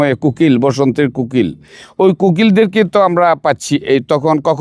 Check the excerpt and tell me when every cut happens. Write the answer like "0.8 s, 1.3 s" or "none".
none